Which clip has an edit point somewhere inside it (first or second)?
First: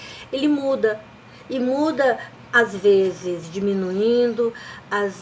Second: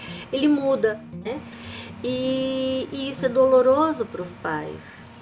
second